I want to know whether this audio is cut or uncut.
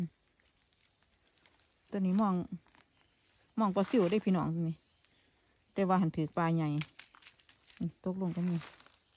uncut